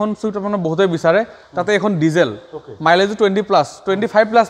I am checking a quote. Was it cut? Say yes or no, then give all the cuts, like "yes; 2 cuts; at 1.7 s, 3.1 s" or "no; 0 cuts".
no; 0 cuts